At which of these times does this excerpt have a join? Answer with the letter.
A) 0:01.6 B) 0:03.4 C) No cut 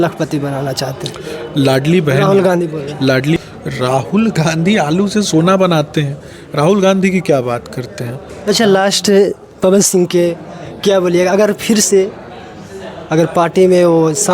B